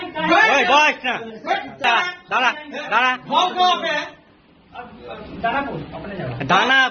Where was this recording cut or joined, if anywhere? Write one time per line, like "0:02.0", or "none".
0:01.8